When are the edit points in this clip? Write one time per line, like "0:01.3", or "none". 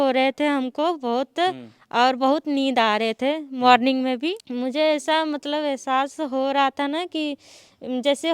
0:04.4